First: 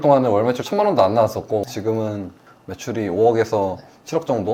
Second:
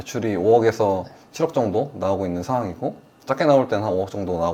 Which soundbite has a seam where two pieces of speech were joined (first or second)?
first